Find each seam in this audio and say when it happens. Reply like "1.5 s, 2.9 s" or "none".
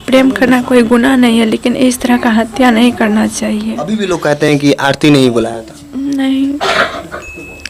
3.8 s